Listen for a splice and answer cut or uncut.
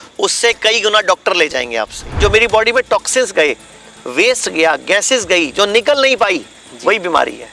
cut